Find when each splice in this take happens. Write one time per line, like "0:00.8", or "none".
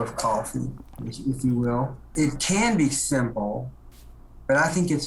0:02.1